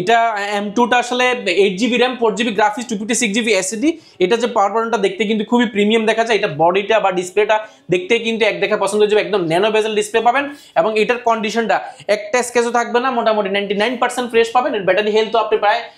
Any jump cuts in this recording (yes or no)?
no